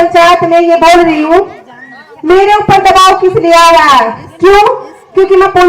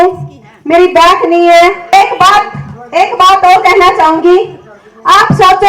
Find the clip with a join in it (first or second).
second